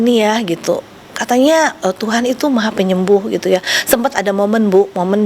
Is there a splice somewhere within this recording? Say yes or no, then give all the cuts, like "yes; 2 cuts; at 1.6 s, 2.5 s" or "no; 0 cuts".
no; 0 cuts